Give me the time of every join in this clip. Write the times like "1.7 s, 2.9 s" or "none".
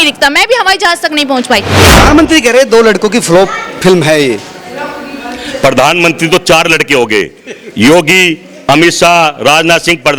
1.7 s